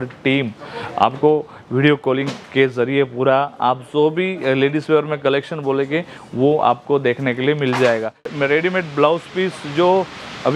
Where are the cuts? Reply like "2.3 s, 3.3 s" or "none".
8.3 s